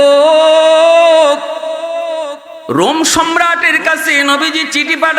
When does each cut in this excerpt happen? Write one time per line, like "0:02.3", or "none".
0:02.5